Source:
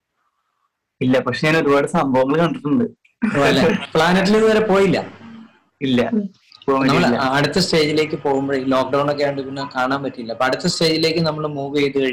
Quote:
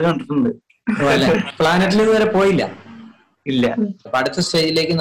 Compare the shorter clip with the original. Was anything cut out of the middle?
yes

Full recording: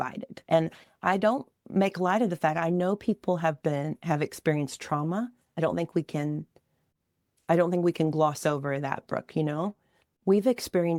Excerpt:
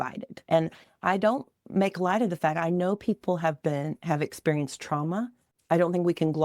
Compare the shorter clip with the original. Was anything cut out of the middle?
yes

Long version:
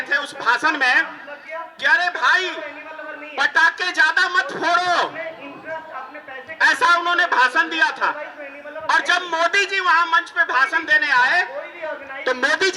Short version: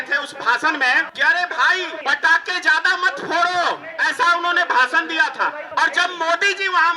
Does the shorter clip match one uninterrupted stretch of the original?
no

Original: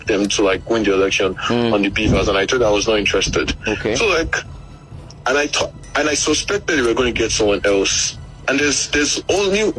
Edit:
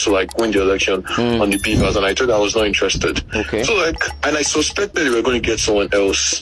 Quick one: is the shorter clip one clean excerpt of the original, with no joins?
no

